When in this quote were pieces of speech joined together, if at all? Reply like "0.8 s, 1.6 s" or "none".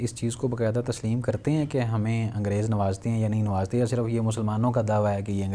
none